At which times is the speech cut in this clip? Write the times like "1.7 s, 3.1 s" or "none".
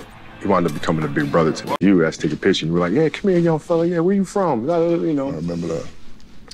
1.8 s